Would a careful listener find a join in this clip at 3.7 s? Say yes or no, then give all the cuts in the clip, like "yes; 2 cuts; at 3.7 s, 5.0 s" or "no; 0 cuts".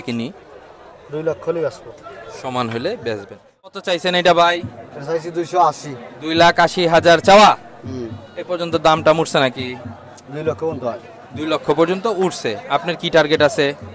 yes; 1 cut; at 3.7 s